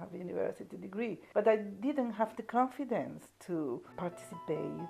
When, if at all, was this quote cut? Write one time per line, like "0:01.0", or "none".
0:01.2
0:03.9